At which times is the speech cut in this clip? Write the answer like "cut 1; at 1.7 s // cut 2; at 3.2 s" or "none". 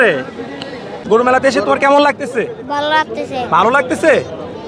cut 1; at 0.9 s